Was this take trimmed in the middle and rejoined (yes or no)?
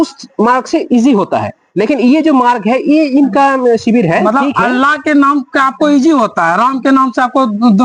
no